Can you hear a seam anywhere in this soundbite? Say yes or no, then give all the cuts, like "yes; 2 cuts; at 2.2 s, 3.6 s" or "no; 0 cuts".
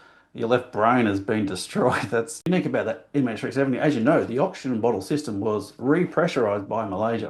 yes; 1 cut; at 2.3 s